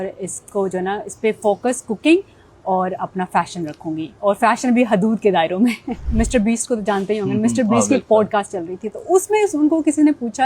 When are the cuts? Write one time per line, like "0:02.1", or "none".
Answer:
0:06.0